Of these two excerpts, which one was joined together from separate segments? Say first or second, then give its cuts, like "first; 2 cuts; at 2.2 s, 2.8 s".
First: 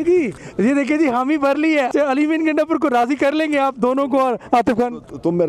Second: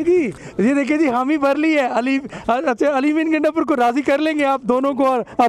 first; 1 cut; at 1.9 s